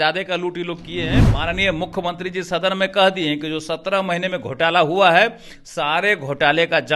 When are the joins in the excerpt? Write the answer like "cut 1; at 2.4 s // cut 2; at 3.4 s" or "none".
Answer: cut 1; at 1.2 s

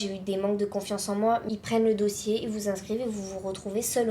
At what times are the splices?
cut 1; at 1.4 s

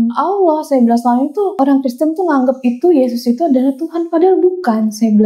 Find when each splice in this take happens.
cut 1; at 1.5 s

